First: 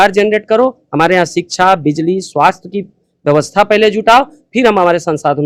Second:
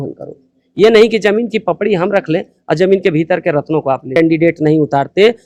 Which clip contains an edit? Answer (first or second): second